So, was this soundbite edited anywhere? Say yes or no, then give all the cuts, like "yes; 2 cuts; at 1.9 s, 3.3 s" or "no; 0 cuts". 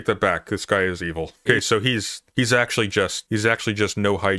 yes; 3 cuts; at 1.4 s, 2.2 s, 3.2 s